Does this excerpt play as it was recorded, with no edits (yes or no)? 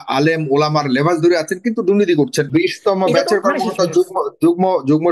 no